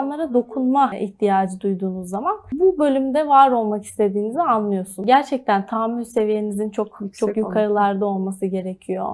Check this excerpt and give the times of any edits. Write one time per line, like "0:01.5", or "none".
0:01.0
0:02.5
0:05.0